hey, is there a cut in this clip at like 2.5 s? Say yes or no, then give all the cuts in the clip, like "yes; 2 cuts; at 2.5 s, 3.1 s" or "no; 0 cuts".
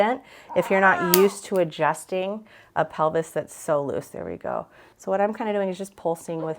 no; 1 cut; at 4.8 s